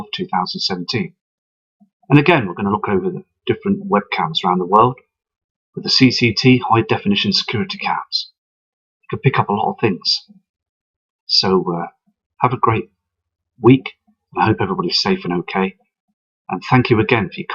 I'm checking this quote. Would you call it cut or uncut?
uncut